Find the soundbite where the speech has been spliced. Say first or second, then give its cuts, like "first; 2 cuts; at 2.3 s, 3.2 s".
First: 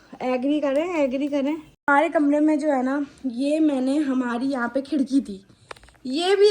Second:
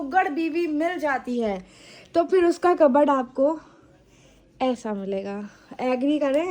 first; 1 cut; at 1.9 s